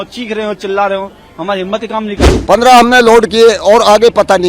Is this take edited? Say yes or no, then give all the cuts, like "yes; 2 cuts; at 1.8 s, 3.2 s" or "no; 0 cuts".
yes; 1 cut; at 2.4 s